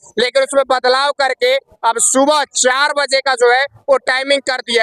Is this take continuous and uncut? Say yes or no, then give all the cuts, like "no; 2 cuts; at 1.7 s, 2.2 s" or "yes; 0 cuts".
yes; 0 cuts